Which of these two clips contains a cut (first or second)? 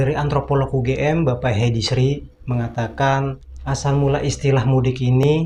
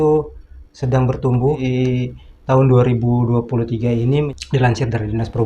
second